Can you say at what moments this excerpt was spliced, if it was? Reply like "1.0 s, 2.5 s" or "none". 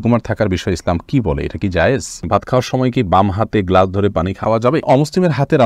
2.3 s, 4.6 s